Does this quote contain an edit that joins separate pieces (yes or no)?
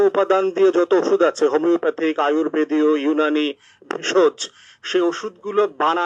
no